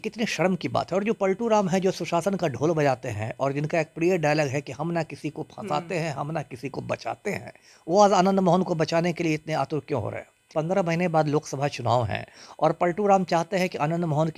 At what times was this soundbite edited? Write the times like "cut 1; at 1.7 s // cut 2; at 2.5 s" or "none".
cut 1; at 10.5 s